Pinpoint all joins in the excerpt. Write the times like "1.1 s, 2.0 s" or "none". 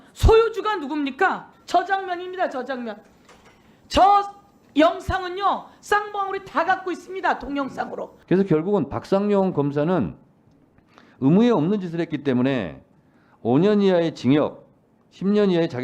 1.5 s, 8.1 s